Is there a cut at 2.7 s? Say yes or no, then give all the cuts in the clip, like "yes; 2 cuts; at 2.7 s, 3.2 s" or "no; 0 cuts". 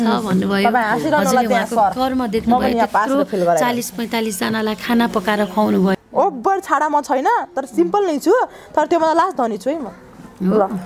no; 1 cut; at 6.0 s